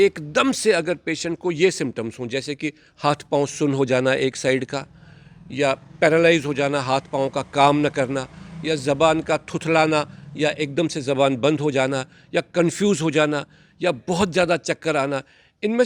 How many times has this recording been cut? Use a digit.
0